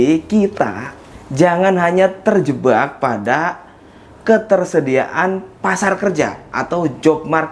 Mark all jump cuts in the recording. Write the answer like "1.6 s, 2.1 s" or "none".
none